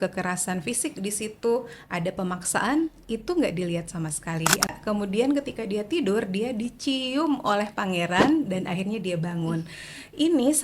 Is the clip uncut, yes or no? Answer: no